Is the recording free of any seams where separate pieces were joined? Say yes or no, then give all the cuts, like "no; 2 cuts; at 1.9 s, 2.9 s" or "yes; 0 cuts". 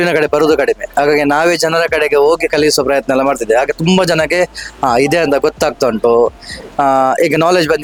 yes; 0 cuts